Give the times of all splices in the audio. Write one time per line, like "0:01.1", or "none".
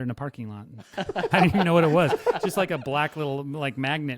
0:01.0